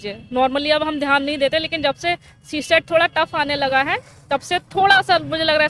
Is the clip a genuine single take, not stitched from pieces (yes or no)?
yes